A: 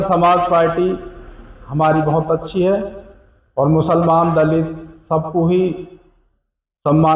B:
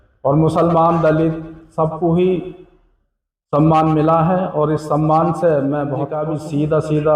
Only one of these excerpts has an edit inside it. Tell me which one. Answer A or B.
B